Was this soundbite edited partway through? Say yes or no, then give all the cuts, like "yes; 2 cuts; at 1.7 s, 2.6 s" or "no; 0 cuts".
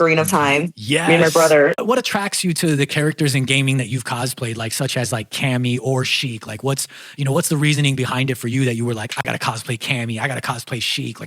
yes; 1 cut; at 2.1 s